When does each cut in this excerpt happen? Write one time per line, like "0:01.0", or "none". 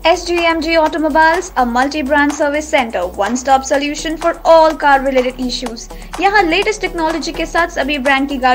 none